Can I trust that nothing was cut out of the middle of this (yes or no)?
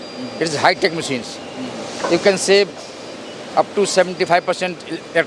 yes